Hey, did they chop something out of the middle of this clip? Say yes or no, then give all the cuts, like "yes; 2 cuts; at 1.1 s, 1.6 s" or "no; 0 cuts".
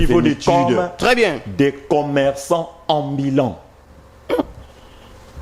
yes; 1 cut; at 1.4 s